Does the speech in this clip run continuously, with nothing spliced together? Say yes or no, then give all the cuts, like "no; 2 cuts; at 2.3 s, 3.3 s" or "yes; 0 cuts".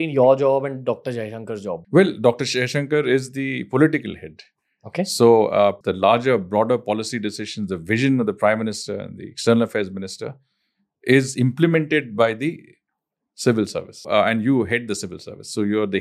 no; 3 cuts; at 1.8 s, 5.8 s, 14.1 s